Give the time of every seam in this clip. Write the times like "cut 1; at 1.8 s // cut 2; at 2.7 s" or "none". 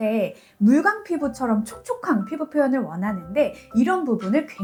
none